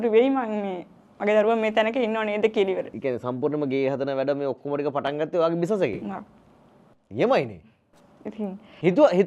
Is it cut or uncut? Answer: uncut